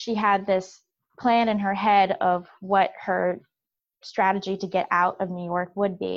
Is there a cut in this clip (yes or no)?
no